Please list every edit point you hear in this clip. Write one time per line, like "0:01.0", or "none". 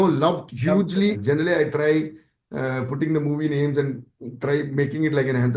0:01.2